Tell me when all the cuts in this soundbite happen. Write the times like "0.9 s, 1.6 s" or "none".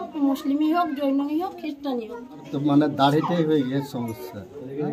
2.5 s